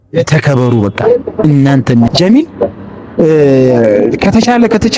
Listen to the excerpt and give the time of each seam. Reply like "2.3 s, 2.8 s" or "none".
2.1 s